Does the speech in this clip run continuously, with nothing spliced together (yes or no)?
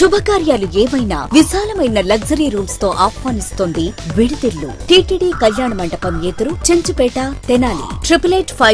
no